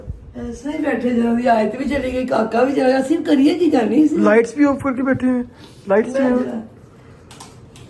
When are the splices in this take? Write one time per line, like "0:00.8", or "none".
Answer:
none